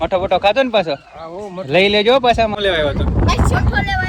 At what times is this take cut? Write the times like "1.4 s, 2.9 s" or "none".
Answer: 2.5 s

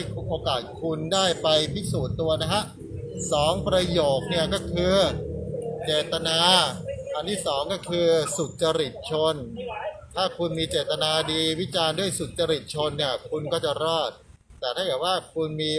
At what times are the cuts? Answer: none

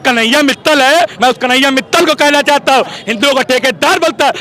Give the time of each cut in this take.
1.1 s, 3.0 s

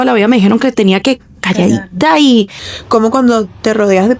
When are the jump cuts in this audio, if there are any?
2.6 s

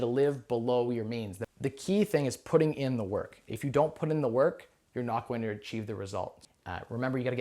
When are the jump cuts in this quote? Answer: 1.4 s, 6.4 s

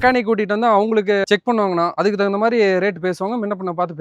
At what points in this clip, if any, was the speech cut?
none

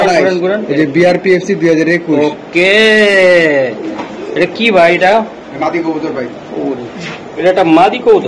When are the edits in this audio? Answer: none

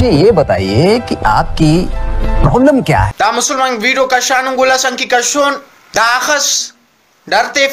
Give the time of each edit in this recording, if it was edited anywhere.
3.1 s, 5.7 s

